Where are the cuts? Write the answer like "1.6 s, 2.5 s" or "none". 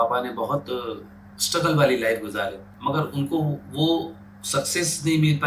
2.7 s